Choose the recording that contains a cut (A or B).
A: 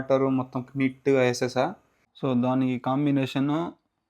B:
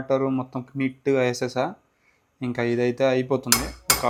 A